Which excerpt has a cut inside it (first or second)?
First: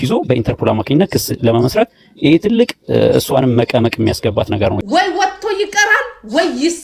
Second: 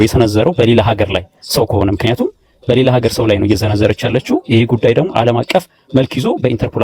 first